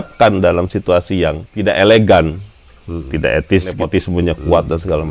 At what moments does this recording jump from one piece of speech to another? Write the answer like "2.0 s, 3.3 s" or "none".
1.5 s, 3.8 s